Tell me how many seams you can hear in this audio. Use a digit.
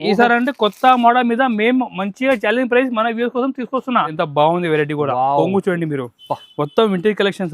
1